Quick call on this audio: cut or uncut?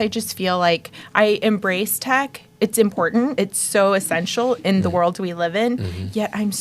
cut